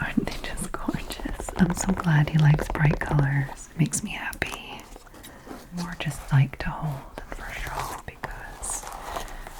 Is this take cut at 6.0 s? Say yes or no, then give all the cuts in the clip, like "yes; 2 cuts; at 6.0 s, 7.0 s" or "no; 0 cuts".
yes; 1 cut; at 6.0 s